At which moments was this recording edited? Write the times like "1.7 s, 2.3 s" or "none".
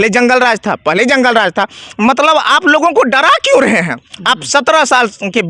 none